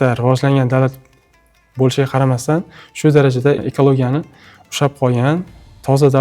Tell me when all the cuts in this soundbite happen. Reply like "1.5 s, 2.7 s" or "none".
3.6 s